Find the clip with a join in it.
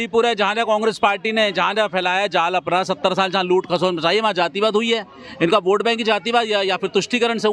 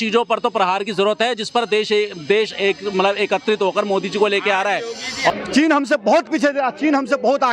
second; 1 cut; at 5.3 s

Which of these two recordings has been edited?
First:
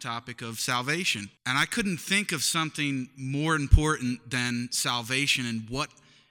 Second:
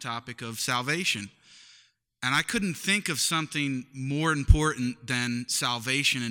first; 1 cut; at 1.4 s

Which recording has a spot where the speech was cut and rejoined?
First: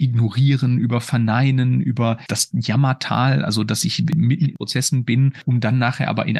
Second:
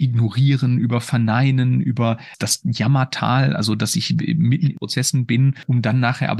first; 2 cuts; at 2.3 s, 4.1 s

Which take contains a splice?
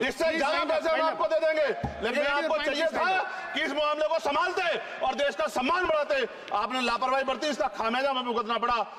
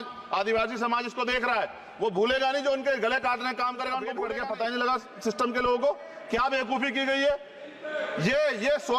second; 1 cut; at 4.1 s

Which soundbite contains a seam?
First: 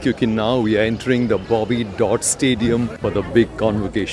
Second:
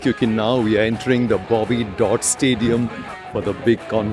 first; 1 cut; at 2.9 s

